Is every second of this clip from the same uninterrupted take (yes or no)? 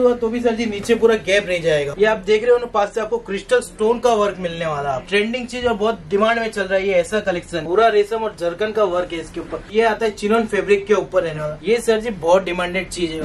no